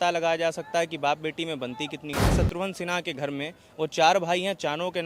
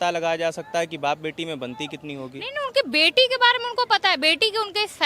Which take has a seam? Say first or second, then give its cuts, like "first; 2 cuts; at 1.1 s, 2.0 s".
first; 1 cut; at 2.3 s